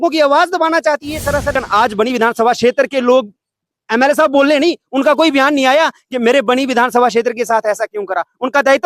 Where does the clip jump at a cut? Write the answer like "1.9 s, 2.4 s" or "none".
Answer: 1.6 s